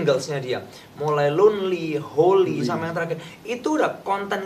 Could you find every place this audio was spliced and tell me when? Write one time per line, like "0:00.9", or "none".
none